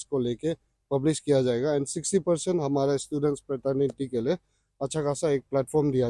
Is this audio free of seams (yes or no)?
yes